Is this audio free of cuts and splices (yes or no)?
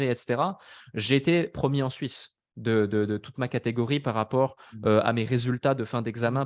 yes